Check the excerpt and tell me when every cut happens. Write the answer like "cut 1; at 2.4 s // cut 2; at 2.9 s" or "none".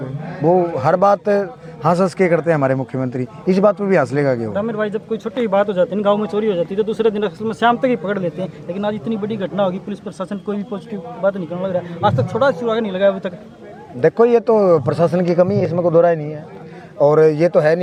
none